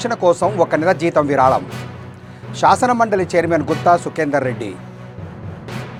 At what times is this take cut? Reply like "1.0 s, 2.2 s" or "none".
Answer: none

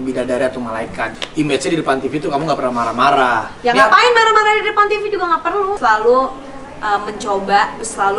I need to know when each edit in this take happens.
1.1 s, 5.8 s

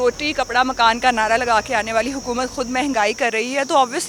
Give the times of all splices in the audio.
none

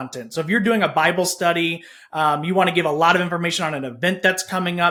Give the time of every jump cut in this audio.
none

